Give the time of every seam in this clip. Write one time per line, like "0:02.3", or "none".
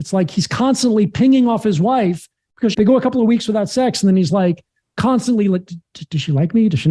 0:02.7